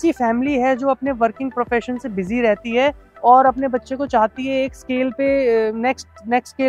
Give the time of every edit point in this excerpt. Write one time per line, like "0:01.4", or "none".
none